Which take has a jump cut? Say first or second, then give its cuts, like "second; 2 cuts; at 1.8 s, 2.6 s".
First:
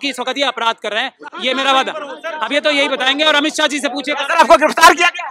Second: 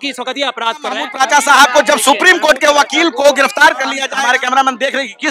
second; 2 cuts; at 1.1 s, 4.1 s